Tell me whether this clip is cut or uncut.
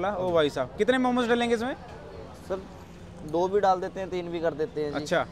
uncut